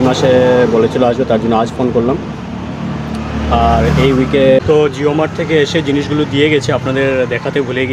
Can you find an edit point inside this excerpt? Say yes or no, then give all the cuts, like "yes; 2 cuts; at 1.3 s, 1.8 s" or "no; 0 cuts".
yes; 1 cut; at 4.6 s